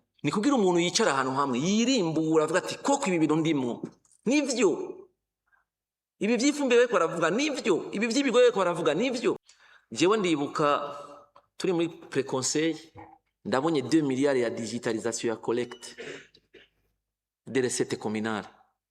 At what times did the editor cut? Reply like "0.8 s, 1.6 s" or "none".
9.4 s